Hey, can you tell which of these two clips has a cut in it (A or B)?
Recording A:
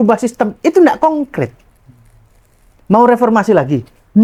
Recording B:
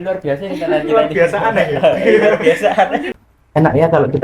B